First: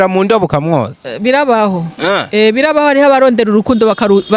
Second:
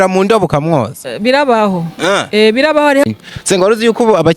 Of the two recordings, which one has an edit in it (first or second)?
second